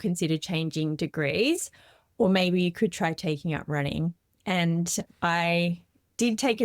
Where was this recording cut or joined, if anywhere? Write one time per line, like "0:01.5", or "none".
none